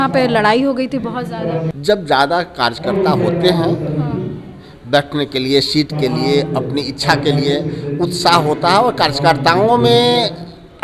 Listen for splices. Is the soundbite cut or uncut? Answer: cut